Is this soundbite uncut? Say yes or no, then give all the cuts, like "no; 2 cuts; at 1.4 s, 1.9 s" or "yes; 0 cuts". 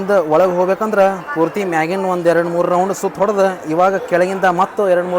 yes; 0 cuts